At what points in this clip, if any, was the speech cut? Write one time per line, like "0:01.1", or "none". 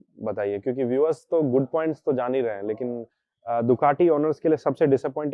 none

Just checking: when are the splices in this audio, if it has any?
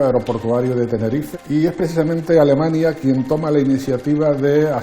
0:01.3

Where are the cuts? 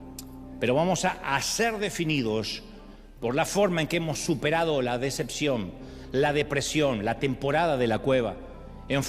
none

